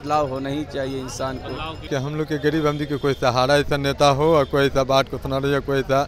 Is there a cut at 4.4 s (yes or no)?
no